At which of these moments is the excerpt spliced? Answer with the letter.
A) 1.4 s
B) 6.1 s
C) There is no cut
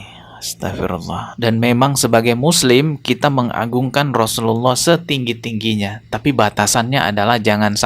A